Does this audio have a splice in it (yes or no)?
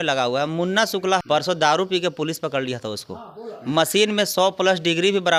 no